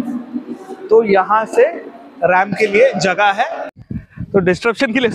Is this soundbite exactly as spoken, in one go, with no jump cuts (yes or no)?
no